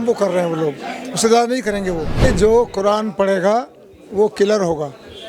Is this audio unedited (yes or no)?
no